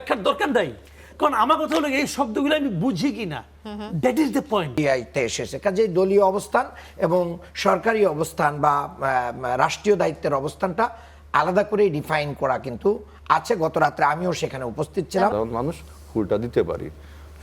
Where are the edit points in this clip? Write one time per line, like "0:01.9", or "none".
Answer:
0:04.7
0:15.3